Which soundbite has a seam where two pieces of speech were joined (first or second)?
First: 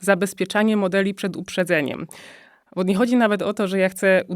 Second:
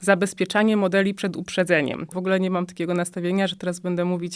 second